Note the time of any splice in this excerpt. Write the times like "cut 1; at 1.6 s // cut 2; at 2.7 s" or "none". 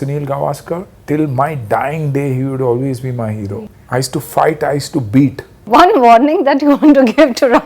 cut 1; at 0.9 s // cut 2; at 3.7 s // cut 3; at 5.5 s

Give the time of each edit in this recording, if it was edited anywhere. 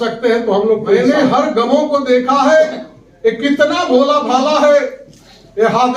cut 1; at 1.0 s

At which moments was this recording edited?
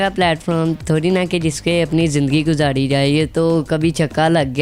none

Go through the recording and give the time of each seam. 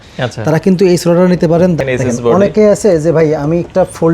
cut 1; at 1.8 s

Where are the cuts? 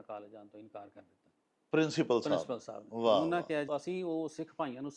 cut 1; at 3.7 s

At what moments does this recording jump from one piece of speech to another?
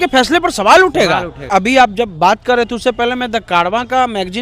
cut 1; at 1.5 s

